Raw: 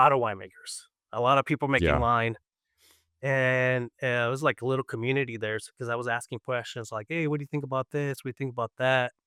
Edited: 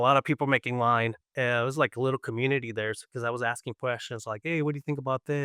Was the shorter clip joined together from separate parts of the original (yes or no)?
yes